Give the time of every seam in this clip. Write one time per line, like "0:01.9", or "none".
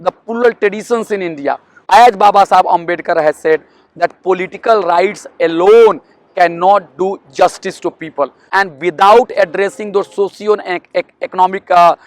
0:01.7
0:08.4